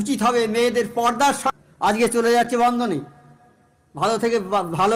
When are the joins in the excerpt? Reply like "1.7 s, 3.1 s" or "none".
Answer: 1.5 s